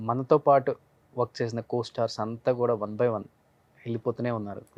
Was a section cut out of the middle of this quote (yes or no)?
no